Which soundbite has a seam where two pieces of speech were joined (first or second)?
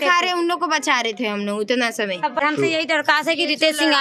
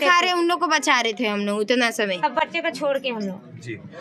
first